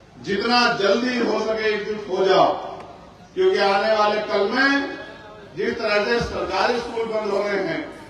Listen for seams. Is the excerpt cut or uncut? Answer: uncut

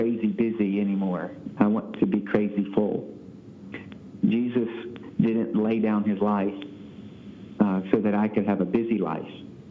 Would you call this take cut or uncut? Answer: uncut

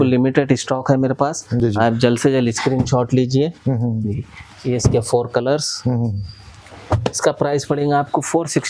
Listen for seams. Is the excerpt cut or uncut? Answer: uncut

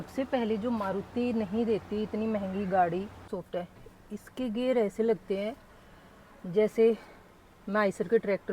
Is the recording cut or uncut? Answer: cut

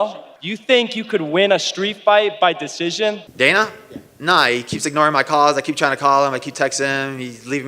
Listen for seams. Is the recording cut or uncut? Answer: cut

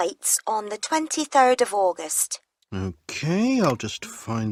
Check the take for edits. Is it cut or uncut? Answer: uncut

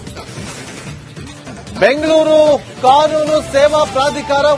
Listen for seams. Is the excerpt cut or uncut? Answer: cut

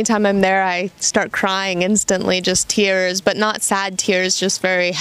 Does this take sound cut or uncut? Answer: uncut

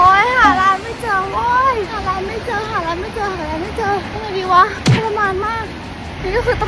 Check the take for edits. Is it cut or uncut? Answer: uncut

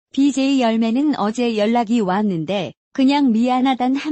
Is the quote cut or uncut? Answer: cut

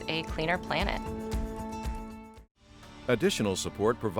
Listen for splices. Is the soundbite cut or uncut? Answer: cut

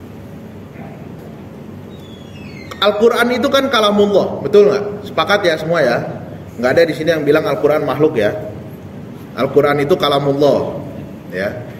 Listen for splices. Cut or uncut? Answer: cut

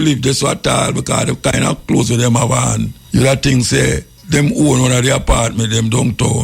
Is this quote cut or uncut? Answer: cut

